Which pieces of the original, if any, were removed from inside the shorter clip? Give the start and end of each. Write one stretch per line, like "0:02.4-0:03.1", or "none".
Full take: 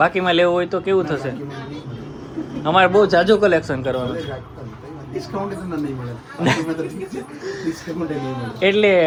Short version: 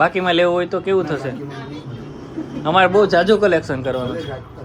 none